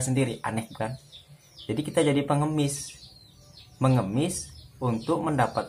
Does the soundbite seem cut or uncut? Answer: uncut